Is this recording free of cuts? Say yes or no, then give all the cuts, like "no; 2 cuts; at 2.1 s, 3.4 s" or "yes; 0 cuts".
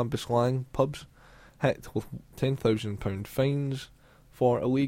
yes; 0 cuts